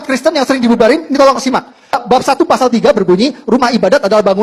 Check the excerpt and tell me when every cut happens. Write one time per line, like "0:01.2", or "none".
none